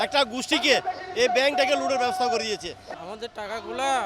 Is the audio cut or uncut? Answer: cut